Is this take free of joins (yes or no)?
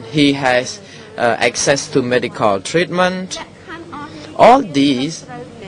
no